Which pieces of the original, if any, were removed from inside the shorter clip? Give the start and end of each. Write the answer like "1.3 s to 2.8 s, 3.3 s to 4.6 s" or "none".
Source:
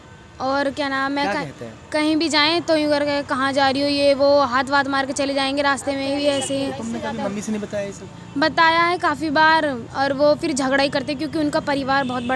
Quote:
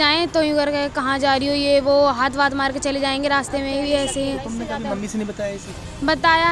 none